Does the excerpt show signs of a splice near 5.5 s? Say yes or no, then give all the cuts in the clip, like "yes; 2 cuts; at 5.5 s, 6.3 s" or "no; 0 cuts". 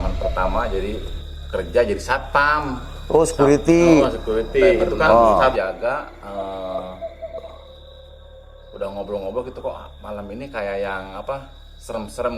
yes; 1 cut; at 5.5 s